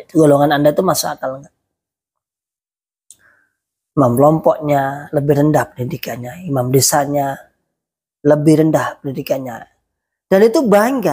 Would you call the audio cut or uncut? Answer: uncut